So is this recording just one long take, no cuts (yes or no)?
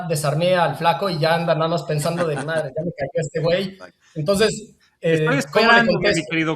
yes